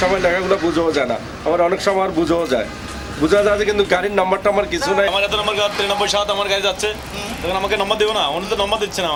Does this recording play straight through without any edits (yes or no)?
yes